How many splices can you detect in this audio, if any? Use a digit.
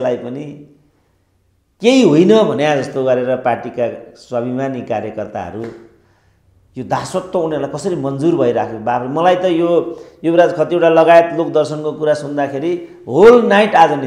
0